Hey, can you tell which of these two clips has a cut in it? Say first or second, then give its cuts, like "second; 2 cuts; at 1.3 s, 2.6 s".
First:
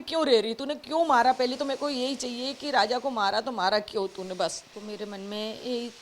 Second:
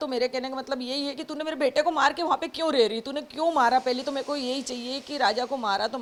first; 1 cut; at 4.7 s